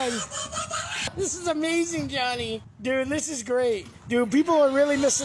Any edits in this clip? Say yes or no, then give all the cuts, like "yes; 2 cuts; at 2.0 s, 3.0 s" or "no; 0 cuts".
yes; 3 cuts; at 1.1 s, 2.7 s, 3.9 s